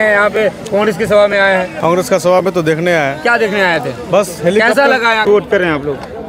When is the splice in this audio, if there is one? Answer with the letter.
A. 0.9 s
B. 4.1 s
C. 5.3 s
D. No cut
C